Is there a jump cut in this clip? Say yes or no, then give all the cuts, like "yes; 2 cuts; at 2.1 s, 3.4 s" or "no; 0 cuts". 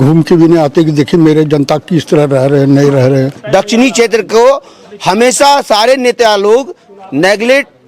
yes; 1 cut; at 3.4 s